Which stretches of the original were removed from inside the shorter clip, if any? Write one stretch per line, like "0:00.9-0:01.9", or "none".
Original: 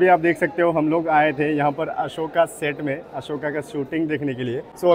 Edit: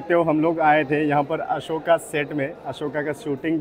none